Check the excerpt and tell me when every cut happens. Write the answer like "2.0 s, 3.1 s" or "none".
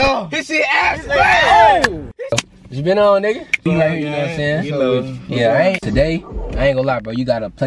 2.4 s, 3.6 s, 5.8 s